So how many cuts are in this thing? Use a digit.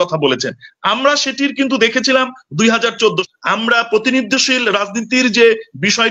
1